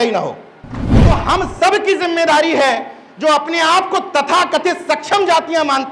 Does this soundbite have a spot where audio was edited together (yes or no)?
yes